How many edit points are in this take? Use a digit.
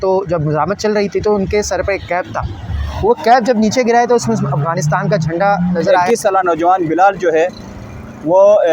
1